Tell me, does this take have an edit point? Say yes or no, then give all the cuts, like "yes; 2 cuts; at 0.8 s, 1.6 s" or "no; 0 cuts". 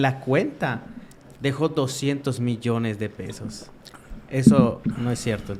no; 0 cuts